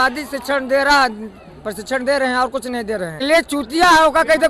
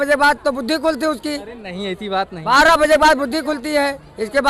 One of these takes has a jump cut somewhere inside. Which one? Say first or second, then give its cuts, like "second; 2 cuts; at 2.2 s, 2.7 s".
first; 1 cut; at 3.2 s